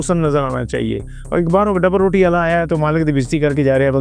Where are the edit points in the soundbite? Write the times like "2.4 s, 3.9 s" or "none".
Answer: 1.2 s